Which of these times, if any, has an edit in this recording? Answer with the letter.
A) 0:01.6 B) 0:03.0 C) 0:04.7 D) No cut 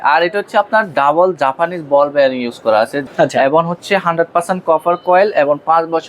B